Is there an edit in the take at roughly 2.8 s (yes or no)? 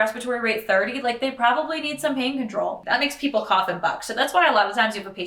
yes